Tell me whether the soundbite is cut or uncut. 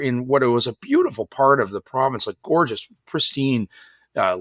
uncut